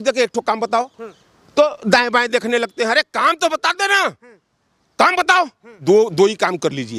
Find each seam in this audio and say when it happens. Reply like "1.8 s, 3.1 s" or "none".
5.7 s

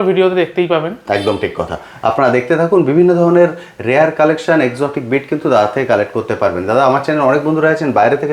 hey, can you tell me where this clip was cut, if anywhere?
none

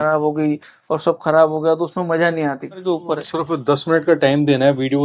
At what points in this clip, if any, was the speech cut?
2.8 s

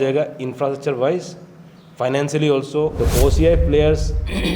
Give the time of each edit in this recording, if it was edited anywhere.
2.9 s

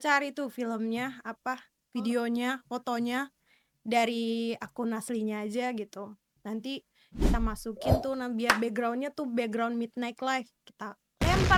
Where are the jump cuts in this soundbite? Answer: none

